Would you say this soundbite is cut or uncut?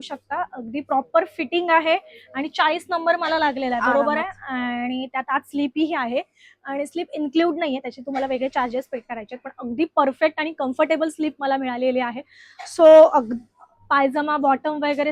uncut